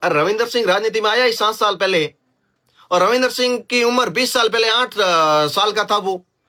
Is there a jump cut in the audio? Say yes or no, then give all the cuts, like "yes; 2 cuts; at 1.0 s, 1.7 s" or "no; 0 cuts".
no; 0 cuts